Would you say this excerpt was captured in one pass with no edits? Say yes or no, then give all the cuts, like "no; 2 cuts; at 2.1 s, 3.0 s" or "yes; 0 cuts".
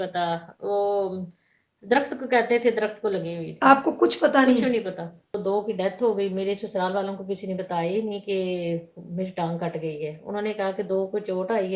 no; 1 cut; at 5.4 s